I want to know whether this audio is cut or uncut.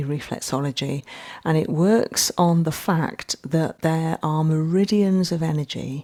uncut